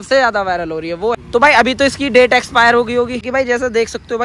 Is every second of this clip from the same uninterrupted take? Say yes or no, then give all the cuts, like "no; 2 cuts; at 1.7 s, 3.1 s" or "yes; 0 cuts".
no; 2 cuts; at 1.2 s, 3.3 s